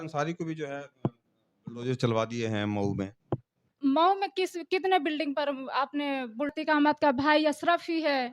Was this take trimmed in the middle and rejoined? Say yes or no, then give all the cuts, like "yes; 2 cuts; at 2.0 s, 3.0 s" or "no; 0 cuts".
yes; 1 cut; at 6.5 s